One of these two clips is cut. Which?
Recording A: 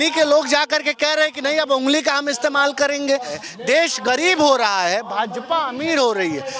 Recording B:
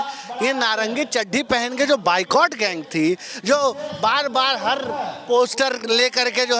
A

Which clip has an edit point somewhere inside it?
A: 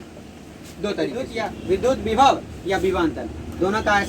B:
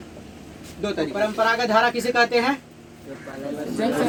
A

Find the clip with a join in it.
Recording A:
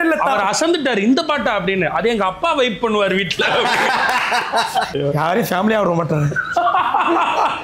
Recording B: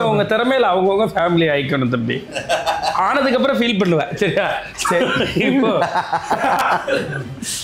A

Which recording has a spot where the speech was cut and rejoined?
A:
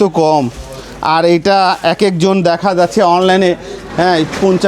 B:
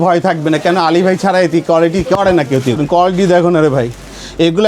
B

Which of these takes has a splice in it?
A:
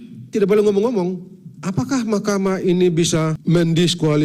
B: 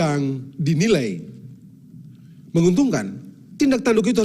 A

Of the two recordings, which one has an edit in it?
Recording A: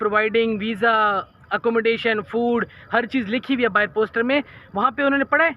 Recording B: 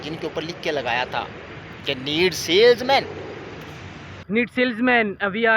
B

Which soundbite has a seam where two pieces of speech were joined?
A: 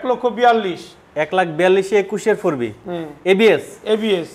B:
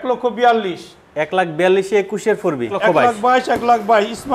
B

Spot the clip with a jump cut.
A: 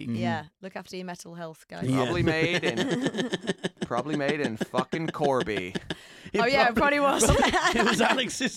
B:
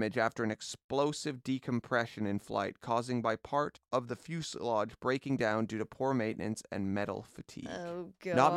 B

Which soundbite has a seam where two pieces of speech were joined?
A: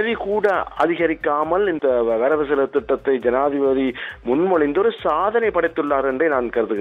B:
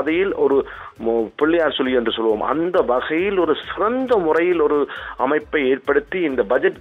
A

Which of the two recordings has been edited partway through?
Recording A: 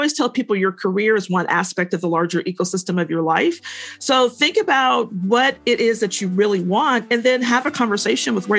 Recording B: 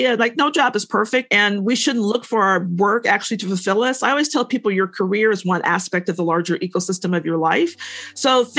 B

